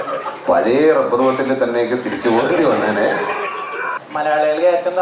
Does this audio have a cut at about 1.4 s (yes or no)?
no